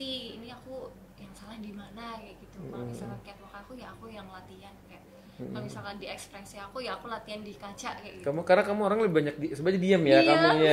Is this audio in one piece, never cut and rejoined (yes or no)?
yes